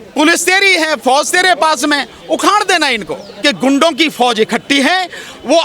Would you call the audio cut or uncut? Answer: cut